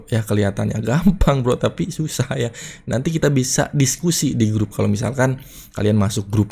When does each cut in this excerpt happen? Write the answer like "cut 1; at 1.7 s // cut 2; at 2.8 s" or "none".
none